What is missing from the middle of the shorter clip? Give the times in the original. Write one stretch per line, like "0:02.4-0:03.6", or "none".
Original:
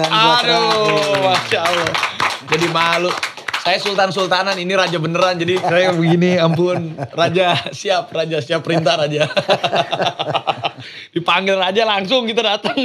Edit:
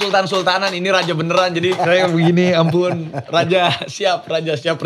none

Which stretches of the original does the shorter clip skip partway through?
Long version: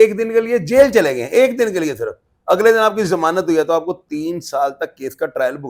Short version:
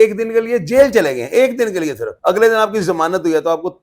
0:02.1-0:02.3

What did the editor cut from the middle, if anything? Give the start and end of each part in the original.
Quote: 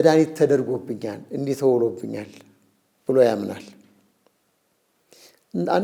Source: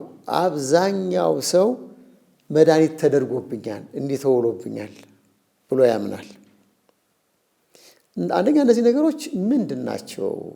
none

